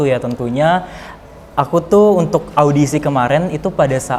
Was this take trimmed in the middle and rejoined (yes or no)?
no